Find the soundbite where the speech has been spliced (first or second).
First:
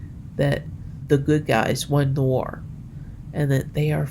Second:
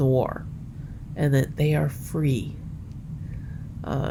first